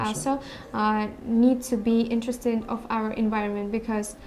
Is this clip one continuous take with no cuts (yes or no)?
yes